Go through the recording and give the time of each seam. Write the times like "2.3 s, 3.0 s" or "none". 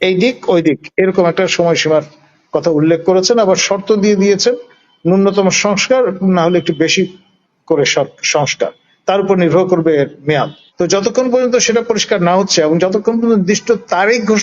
10.6 s